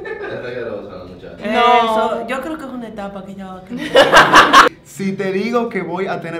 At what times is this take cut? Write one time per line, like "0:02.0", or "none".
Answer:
0:04.7